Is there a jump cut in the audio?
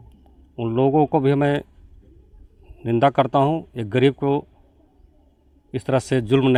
no; 0 cuts

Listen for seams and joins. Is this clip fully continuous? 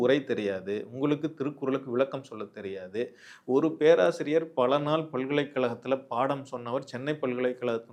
yes; 0 cuts

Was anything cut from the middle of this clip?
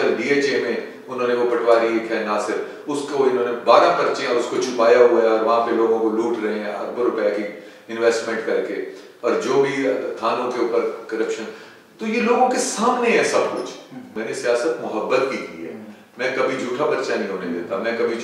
yes; 1 cut; at 14.2 s

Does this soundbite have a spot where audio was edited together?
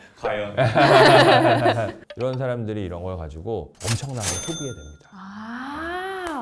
yes; 1 cut; at 2.0 s

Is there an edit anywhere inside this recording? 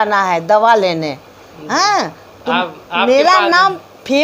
no; 0 cuts

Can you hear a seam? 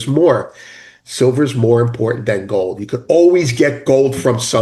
no; 0 cuts

